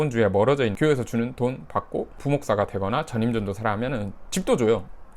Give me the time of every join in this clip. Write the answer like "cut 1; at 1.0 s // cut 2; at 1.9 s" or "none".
cut 1; at 0.7 s // cut 2; at 2.2 s